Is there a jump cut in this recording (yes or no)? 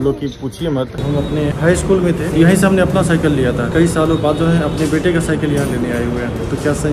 yes